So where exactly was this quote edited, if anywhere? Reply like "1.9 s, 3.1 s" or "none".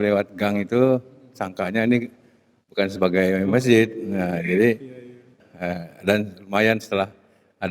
5.5 s